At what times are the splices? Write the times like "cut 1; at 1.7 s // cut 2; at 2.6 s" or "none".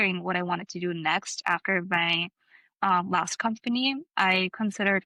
none